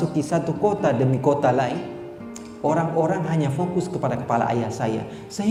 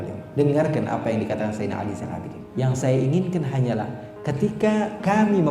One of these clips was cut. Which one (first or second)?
second